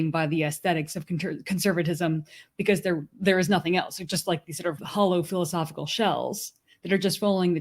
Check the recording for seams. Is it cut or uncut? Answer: cut